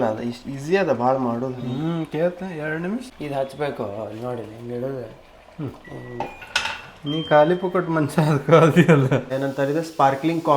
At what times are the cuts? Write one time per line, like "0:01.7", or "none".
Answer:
0:03.1
0:09.3